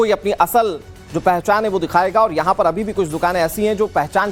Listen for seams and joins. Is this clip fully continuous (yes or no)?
yes